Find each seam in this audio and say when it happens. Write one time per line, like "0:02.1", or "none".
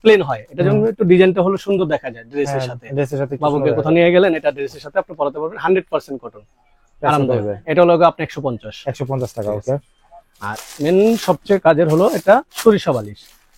none